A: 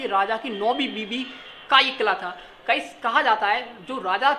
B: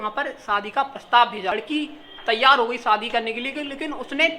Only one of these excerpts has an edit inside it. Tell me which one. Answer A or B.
B